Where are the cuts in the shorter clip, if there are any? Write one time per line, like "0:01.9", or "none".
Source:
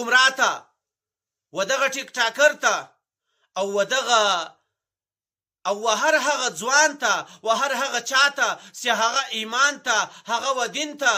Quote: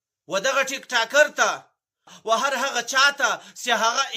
0:02.1